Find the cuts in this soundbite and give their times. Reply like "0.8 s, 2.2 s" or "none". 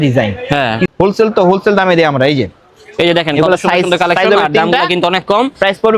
0.9 s